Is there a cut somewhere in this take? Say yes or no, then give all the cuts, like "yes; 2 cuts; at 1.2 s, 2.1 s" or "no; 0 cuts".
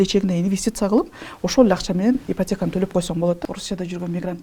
yes; 1 cut; at 3.4 s